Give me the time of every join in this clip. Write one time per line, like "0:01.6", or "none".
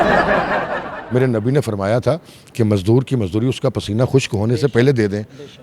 0:00.9